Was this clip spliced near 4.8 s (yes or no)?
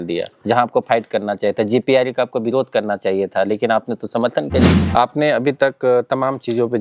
yes